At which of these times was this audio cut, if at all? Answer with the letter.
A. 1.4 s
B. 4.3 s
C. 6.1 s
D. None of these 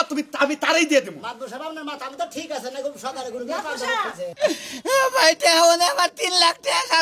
B